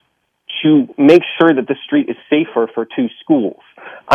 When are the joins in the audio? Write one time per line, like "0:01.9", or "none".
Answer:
none